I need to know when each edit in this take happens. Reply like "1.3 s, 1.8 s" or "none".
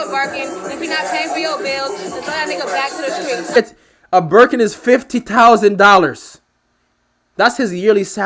3.5 s